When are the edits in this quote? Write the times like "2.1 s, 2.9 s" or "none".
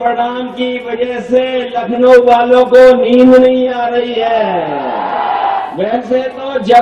5.7 s